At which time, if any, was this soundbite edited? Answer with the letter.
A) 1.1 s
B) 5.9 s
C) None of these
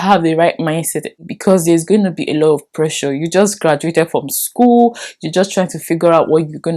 A